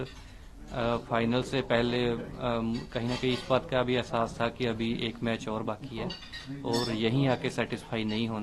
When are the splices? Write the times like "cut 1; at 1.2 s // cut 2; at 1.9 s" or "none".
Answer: none